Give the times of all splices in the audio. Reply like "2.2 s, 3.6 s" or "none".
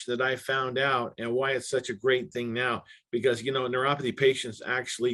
none